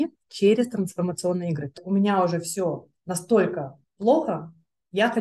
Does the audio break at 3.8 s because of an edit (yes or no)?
no